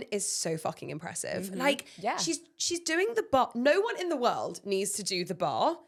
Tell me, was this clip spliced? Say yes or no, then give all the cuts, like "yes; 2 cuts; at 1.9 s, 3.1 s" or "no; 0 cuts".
no; 0 cuts